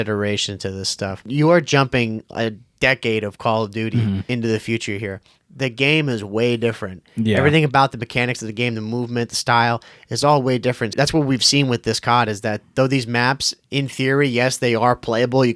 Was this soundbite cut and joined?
yes; 3 cuts; at 1.3 s, 4.3 s, 10.9 s

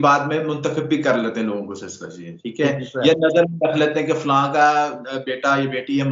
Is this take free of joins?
yes; 0 cuts

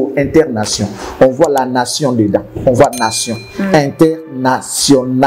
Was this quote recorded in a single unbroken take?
yes; 0 cuts

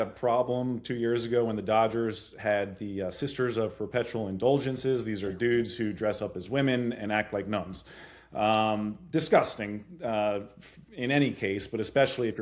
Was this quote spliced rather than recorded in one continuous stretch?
no; 0 cuts

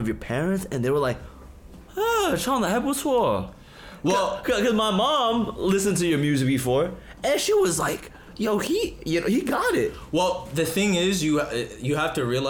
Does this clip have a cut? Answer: no; 0 cuts

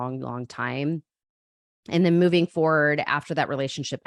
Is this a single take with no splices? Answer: yes; 0 cuts

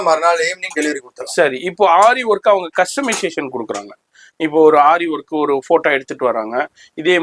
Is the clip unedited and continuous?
yes; 0 cuts

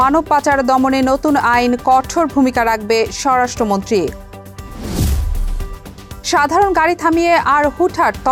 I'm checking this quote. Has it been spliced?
no; 0 cuts

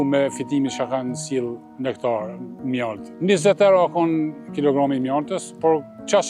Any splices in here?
yes; 1 cut; at 3.0 s

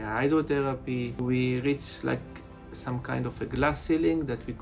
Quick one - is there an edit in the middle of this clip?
yes; 1 cut; at 1.2 s

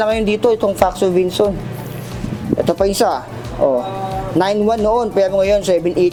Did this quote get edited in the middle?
no; 0 cuts

